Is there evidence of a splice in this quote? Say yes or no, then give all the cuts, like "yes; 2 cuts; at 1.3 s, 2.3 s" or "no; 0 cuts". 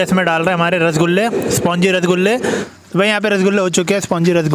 yes; 1 cut; at 2.6 s